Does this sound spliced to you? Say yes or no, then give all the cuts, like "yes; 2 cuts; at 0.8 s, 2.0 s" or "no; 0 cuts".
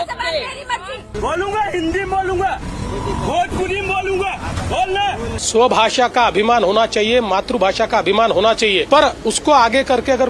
yes; 1 cut; at 5.4 s